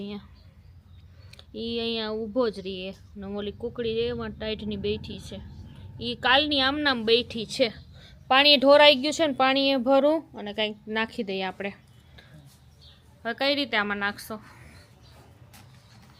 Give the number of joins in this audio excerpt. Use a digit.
0